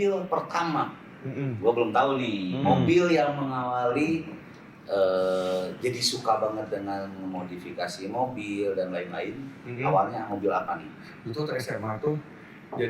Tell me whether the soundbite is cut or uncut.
uncut